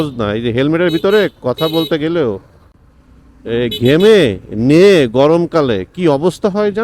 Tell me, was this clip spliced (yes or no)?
no